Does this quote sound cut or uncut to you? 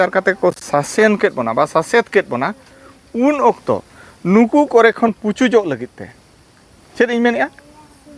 uncut